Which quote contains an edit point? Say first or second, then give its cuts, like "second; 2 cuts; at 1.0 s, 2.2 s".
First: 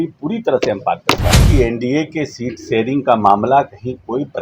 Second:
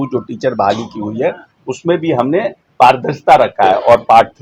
first; 1 cut; at 1.4 s